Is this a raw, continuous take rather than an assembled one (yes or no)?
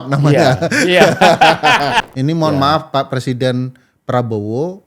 no